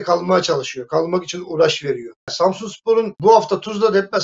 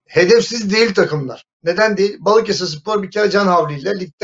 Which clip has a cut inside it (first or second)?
first